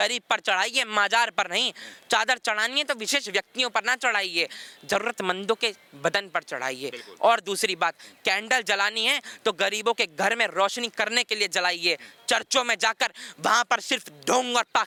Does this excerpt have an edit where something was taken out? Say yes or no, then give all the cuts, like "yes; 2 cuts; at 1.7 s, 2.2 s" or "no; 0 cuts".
no; 0 cuts